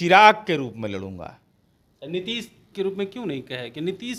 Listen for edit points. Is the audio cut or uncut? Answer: uncut